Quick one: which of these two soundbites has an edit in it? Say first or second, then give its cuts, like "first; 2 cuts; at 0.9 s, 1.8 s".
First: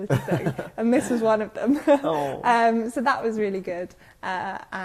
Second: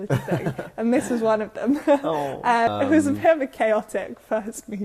second; 1 cut; at 2.7 s